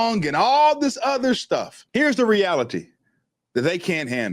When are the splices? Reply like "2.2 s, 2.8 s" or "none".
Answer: 1.8 s